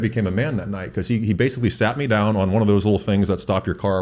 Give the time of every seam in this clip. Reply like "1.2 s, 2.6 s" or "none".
none

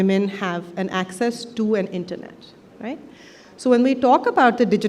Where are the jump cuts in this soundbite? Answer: none

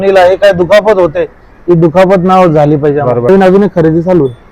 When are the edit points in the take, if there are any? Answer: 3.3 s

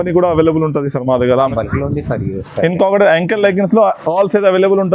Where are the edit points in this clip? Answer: 1.5 s

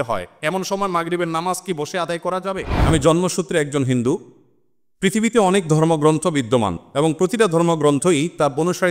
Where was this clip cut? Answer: 2.8 s

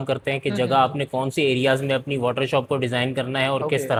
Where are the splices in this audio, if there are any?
none

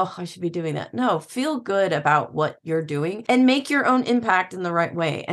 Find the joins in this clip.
3.2 s

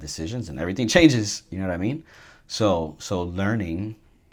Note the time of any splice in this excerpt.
none

